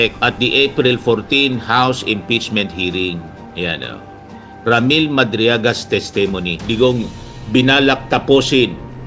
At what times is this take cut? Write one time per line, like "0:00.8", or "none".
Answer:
0:06.7